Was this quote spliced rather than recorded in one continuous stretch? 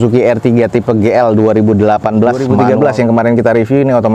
yes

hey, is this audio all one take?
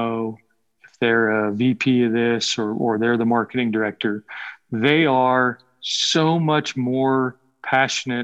yes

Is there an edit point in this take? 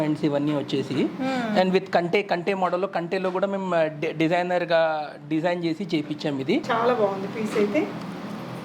yes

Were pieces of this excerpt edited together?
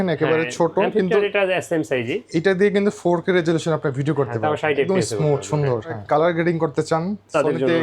yes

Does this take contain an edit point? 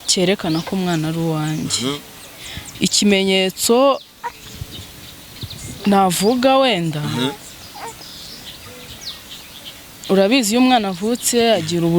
no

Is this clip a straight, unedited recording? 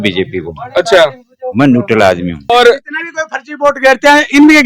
no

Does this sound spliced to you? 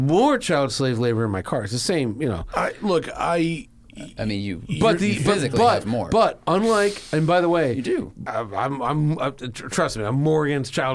yes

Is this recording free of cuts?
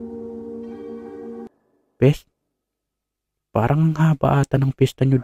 no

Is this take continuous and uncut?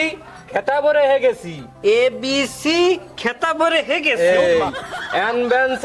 yes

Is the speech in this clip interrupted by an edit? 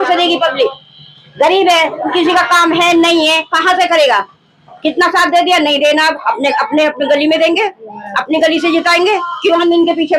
no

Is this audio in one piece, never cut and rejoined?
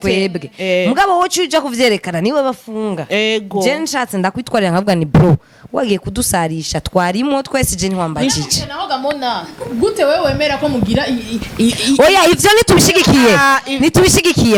yes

